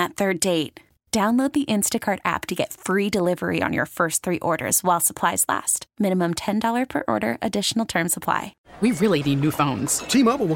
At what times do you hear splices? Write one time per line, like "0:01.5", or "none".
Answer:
0:08.6

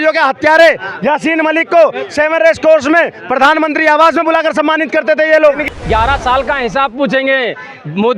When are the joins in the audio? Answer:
0:05.6

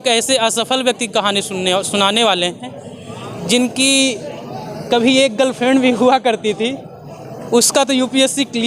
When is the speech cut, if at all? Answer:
none

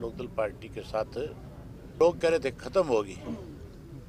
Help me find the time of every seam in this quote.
0:02.0

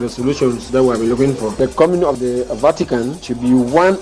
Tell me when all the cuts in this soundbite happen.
0:01.5

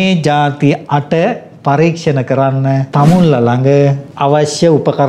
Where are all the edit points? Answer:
0:02.9
0:04.1

